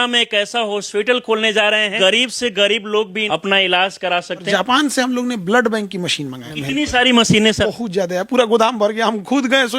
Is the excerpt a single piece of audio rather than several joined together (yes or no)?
no